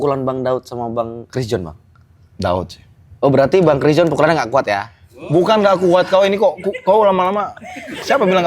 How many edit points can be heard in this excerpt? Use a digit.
1